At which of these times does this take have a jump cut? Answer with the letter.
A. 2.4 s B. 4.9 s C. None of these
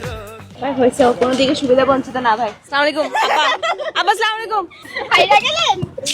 B